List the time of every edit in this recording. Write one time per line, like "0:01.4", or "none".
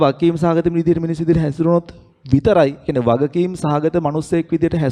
none